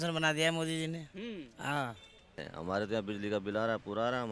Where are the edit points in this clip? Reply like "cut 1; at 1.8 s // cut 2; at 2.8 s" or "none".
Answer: cut 1; at 2.5 s